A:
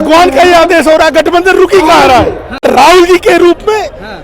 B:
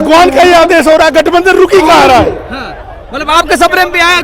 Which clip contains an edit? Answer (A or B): A